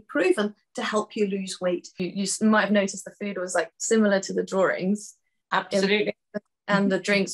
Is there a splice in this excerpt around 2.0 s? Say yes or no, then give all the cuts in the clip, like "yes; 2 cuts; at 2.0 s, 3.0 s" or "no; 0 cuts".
yes; 1 cut; at 2.0 s